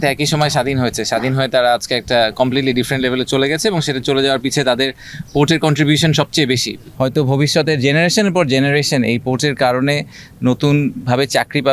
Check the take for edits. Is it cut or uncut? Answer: cut